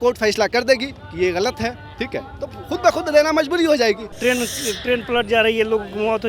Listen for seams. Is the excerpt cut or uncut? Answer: cut